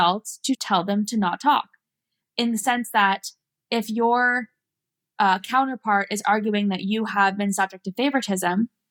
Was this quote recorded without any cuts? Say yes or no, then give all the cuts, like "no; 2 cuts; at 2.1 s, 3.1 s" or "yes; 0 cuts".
yes; 0 cuts